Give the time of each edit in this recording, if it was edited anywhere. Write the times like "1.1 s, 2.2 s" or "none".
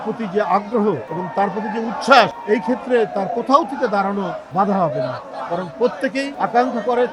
1.1 s, 2.4 s, 4.4 s, 6.3 s